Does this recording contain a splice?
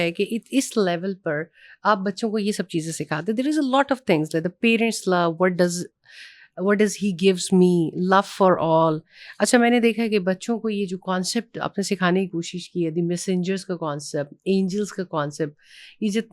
no; 0 cuts

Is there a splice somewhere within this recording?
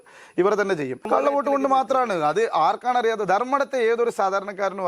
yes; 1 cut; at 1.0 s

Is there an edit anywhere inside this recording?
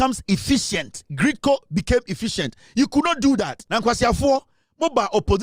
yes; 1 cut; at 3.6 s

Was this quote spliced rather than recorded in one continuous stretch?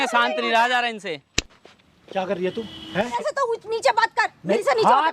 yes; 1 cut; at 3.2 s

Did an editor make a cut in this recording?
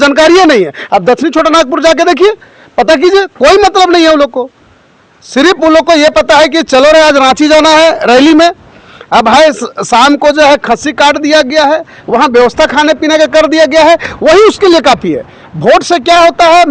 no; 0 cuts

